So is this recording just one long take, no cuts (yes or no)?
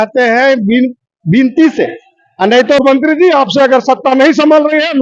no